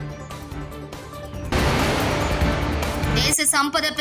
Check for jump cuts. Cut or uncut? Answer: cut